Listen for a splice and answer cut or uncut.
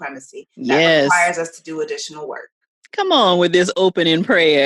uncut